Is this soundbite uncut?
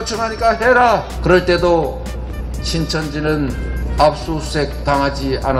no; 1 cut; at 1.1 s

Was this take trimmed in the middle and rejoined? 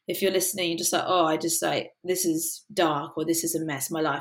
no; 0 cuts

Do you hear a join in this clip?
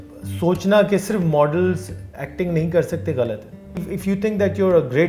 yes; 1 cut; at 3.7 s

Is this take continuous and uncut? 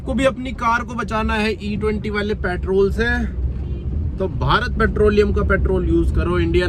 yes; 0 cuts

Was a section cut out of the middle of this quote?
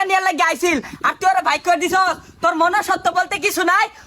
no; 0 cuts

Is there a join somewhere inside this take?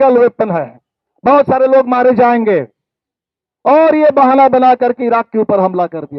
no; 0 cuts

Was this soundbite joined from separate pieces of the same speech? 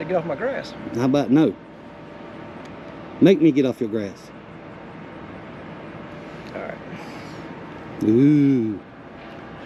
no; 0 cuts

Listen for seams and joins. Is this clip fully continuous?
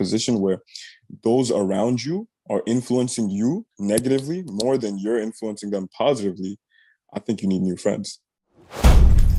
yes; 0 cuts

